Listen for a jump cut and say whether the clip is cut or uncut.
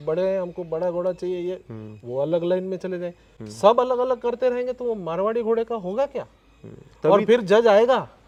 uncut